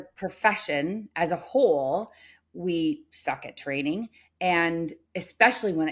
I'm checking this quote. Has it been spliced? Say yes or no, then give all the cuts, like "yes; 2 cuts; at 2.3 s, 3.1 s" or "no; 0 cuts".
no; 0 cuts